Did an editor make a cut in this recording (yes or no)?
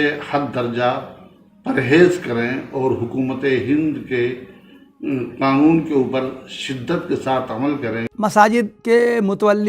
yes